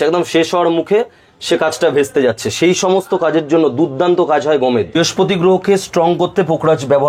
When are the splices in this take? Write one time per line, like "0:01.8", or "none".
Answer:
0:04.9